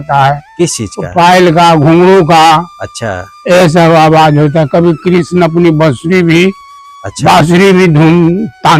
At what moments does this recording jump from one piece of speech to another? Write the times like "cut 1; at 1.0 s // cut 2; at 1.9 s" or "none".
none